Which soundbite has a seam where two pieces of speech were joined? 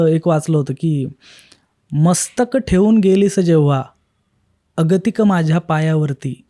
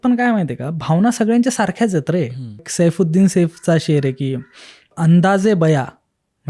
second; 2 cuts; at 2.7 s, 4.9 s

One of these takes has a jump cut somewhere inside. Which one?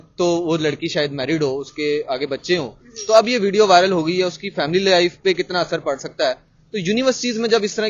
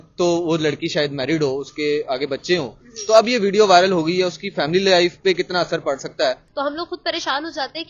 second; 1 cut; at 6.4 s

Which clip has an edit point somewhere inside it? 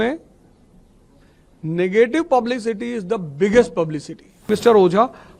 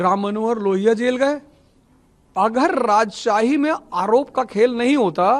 first; 1 cut; at 4.5 s

